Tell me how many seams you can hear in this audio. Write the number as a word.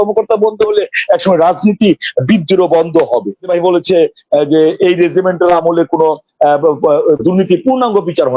one